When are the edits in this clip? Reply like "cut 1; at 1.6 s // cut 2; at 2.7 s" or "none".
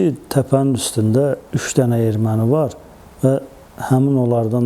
cut 1; at 1.5 s